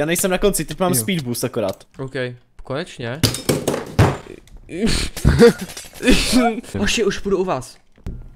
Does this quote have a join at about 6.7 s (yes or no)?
yes